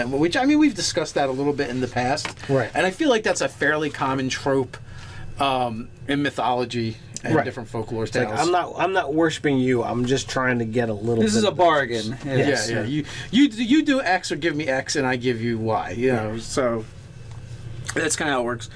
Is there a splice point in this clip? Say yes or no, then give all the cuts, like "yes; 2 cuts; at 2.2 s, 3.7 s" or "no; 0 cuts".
yes; 1 cut; at 4.9 s